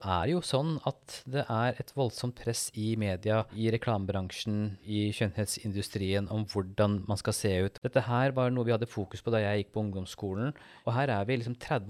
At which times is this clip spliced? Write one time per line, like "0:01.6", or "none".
0:03.5
0:04.8
0:07.7
0:10.7